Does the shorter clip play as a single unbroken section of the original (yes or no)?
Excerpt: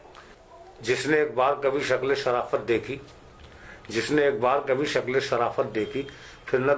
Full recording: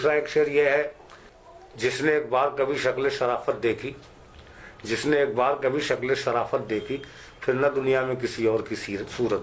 yes